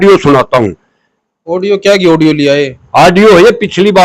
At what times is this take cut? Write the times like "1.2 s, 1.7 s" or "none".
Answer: none